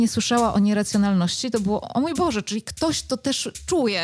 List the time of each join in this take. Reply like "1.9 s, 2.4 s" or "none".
none